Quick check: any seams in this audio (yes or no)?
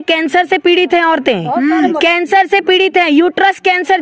no